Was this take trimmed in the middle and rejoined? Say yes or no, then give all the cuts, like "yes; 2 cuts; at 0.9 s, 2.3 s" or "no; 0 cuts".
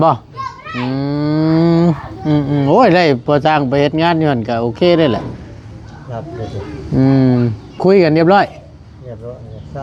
no; 0 cuts